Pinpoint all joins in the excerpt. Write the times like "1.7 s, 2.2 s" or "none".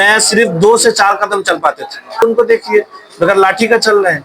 2.2 s